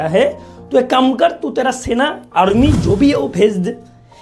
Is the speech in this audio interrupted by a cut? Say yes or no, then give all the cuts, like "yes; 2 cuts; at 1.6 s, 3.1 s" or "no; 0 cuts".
no; 0 cuts